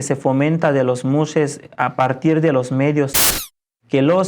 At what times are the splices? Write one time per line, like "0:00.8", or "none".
0:03.3